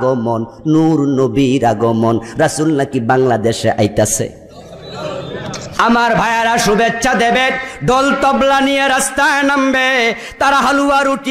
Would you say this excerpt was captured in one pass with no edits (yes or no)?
no